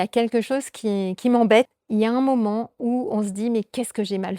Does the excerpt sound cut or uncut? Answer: cut